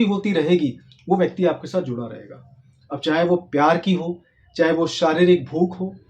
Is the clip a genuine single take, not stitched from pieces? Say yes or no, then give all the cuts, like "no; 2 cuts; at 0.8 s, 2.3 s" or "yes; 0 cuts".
yes; 0 cuts